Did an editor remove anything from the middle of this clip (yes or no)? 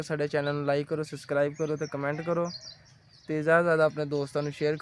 no